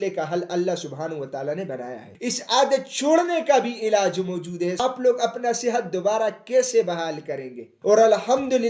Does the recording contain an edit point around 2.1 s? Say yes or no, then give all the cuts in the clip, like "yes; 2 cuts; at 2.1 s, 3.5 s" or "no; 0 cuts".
yes; 3 cuts; at 2.1 s, 4.8 s, 7.7 s